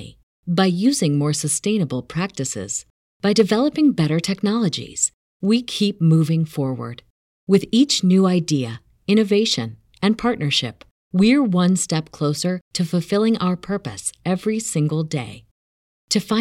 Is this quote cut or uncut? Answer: uncut